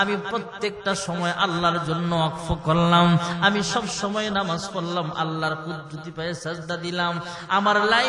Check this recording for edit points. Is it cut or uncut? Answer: uncut